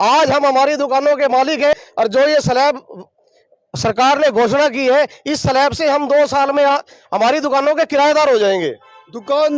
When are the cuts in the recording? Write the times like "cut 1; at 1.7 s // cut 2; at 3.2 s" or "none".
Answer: cut 1; at 1.7 s